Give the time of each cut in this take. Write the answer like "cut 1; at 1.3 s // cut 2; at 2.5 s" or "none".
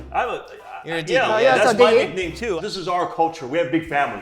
cut 1; at 2.6 s